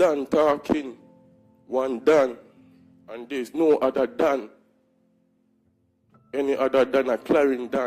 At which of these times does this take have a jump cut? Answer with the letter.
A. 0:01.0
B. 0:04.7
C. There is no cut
C